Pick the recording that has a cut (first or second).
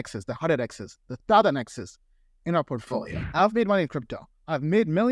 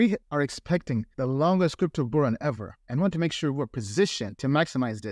first